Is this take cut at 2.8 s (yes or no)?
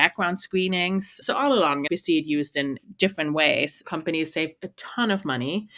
yes